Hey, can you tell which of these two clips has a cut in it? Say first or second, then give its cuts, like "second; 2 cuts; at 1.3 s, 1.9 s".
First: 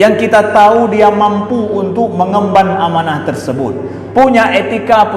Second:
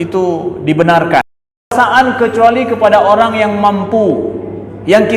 second; 1 cut; at 1.7 s